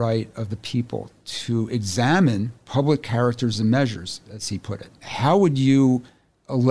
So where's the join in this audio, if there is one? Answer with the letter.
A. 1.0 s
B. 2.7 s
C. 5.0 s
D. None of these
C